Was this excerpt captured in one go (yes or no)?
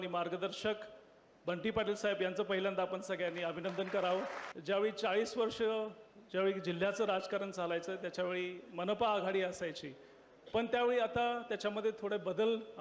no